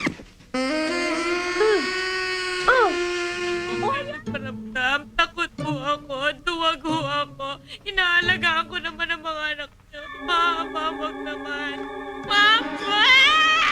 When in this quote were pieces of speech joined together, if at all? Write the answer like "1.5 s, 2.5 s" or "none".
4.0 s